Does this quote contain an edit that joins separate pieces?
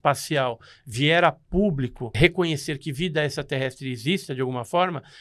yes; 1 cut; at 2.2 s

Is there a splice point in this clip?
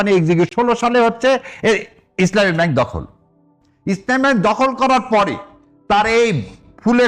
no; 0 cuts

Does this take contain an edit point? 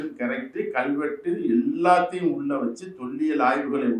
no; 0 cuts

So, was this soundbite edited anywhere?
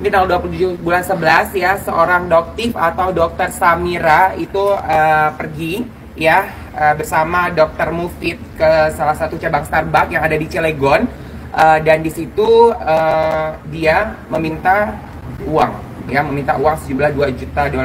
no; 0 cuts

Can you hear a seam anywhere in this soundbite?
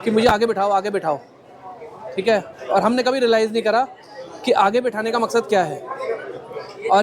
no; 0 cuts

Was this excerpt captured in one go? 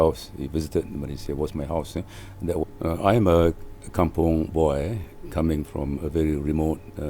no; 1 cut; at 2.6 s

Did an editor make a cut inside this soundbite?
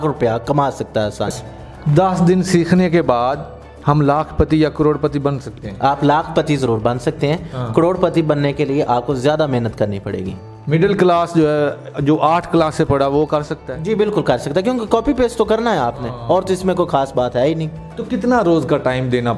yes; 2 cuts; at 1.3 s, 10.3 s

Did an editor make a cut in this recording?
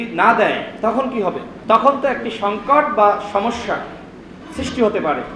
yes; 1 cut; at 1.5 s

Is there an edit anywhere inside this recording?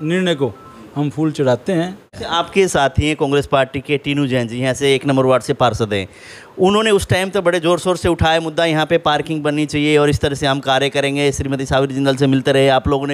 yes; 1 cut; at 2.1 s

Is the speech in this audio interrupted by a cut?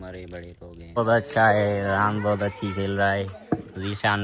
yes; 1 cut; at 1.0 s

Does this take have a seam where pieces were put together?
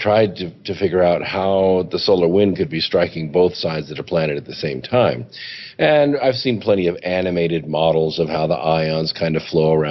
no; 0 cuts

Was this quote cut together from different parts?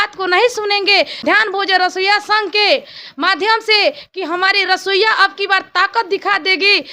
yes; 1 cut; at 1.2 s

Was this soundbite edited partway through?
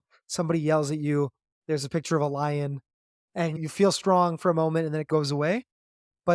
yes; 2 cuts; at 3.6 s, 5.0 s

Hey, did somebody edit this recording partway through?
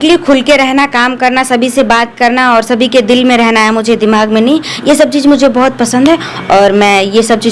no; 0 cuts

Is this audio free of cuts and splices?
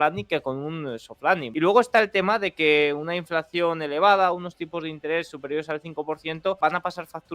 no; 2 cuts; at 1.5 s, 6.6 s

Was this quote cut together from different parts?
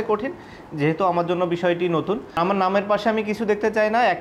yes; 1 cut; at 2.4 s

